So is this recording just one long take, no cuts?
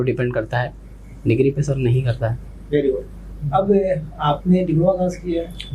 yes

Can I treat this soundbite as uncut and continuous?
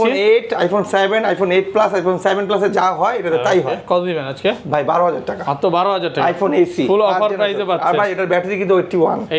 yes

